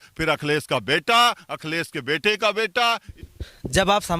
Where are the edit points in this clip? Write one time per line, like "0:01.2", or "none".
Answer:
0:03.2

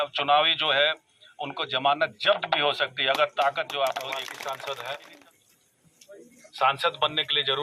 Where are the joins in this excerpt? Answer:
0:04.1

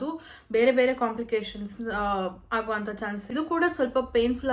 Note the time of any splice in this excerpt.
0:03.3

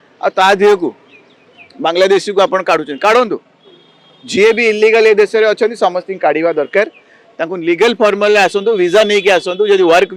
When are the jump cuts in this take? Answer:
none

